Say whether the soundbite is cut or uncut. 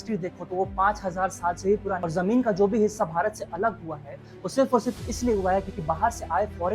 cut